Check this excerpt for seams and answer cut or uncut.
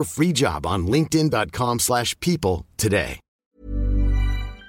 cut